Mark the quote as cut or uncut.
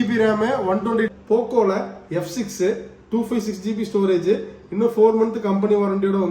cut